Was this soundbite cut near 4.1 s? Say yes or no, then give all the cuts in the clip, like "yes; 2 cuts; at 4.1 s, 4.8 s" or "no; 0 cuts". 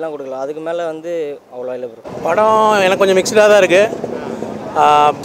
no; 0 cuts